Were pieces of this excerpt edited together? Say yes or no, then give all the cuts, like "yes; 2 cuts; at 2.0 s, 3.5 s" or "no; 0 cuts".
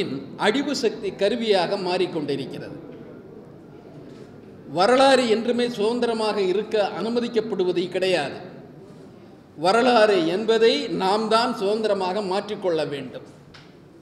no; 0 cuts